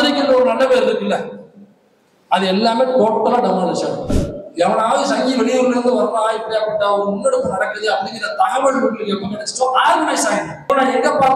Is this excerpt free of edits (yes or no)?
no